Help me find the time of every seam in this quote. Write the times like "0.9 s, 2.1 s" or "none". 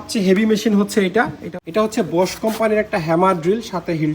1.4 s